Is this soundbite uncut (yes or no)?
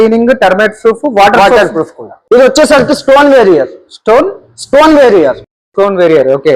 no